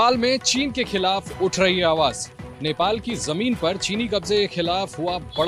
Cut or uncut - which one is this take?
uncut